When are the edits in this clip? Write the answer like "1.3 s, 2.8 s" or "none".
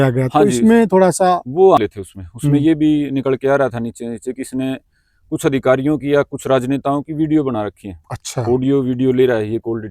1.8 s